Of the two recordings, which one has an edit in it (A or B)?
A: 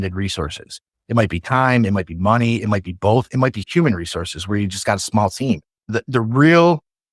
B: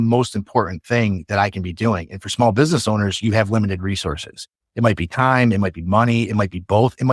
A